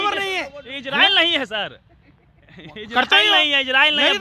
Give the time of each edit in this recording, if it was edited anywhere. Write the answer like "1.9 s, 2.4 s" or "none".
none